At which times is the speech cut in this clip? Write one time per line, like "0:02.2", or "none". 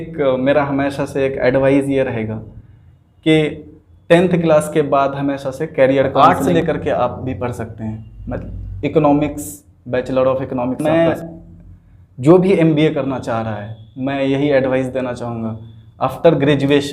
0:06.1
0:10.8

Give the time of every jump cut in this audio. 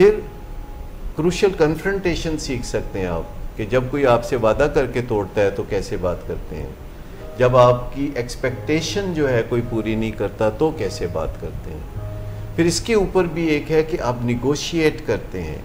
none

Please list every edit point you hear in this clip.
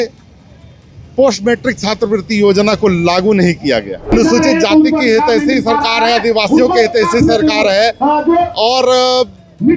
0:04.1

